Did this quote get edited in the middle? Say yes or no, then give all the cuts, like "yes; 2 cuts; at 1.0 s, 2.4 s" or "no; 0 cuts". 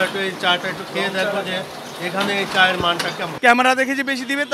yes; 1 cut; at 3.3 s